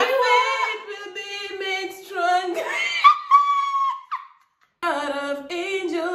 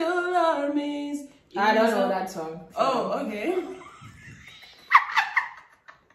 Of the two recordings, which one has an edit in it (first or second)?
first